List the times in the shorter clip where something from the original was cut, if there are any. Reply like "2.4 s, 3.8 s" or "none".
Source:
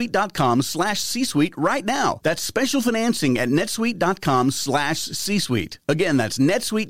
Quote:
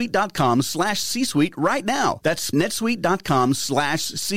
2.5 s